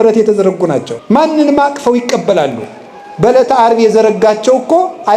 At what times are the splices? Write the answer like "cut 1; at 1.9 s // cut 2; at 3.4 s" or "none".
cut 1; at 0.9 s